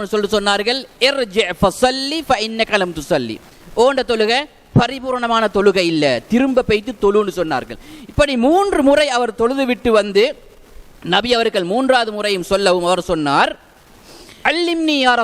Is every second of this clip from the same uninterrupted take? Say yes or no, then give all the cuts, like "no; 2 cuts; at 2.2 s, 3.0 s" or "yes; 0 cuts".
no; 1 cut; at 14.3 s